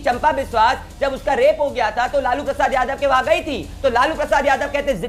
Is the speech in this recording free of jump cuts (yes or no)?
yes